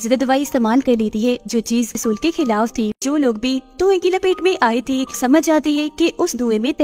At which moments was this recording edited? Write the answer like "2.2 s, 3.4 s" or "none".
2.0 s, 3.0 s